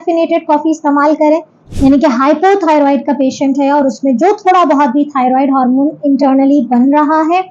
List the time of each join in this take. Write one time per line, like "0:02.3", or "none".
0:01.6